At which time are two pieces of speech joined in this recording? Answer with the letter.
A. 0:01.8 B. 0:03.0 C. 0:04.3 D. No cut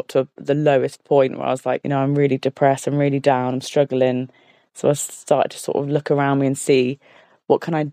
A